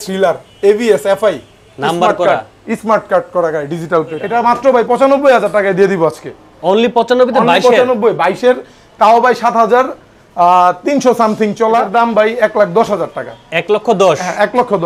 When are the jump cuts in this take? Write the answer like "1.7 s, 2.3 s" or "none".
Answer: 4.2 s, 11.9 s